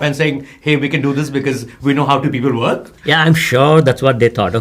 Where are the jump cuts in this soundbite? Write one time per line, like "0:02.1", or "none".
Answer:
0:02.9